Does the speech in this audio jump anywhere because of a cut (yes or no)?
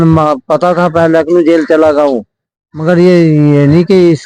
no